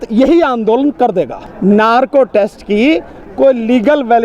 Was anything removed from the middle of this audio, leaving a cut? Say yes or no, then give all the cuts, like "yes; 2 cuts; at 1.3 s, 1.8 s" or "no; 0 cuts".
yes; 1 cut; at 1.4 s